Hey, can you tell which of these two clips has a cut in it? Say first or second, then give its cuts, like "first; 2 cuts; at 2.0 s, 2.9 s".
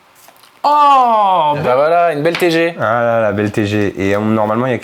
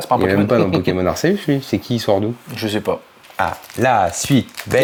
first; 1 cut; at 1.6 s